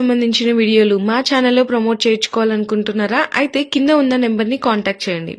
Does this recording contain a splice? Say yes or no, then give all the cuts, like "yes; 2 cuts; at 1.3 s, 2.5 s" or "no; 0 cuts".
no; 0 cuts